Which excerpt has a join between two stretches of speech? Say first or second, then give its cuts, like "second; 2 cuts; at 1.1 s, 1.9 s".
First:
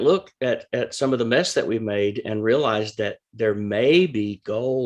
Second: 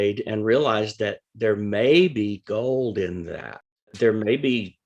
second; 1 cut; at 3.9 s